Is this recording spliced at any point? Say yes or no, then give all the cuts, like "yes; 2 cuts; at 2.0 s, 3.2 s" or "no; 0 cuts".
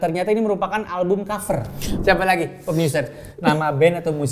yes; 1 cut; at 1.8 s